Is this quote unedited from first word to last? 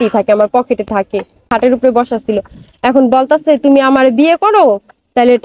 no; 1 cut; at 1.5 s

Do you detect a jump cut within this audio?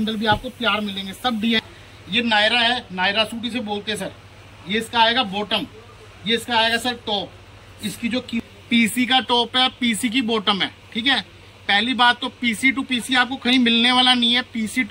yes; 2 cuts; at 1.6 s, 8.4 s

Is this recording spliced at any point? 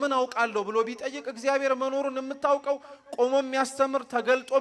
no; 0 cuts

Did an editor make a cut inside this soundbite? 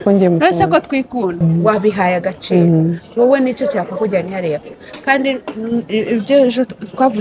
yes; 1 cut; at 1.4 s

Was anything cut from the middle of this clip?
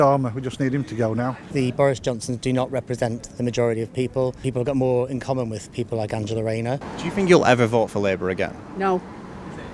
yes; 3 cuts; at 1.4 s, 4.4 s, 6.9 s

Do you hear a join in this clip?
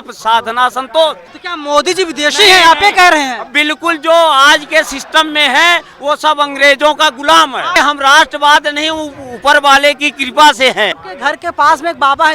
yes; 3 cuts; at 1.3 s, 7.8 s, 11.0 s

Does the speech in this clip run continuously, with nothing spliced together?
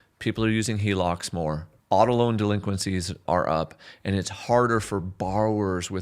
no; 2 cuts; at 1.7 s, 3.2 s

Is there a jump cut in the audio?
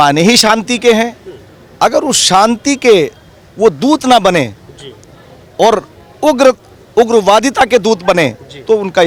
no; 0 cuts

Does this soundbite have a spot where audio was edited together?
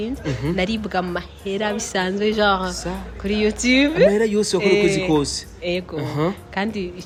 no; 0 cuts

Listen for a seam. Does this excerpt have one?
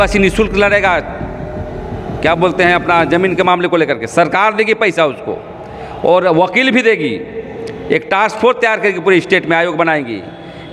no; 0 cuts

